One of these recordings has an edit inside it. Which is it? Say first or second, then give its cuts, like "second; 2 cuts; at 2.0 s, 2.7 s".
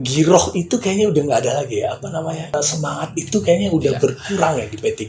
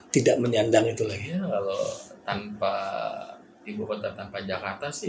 first; 1 cut; at 2.5 s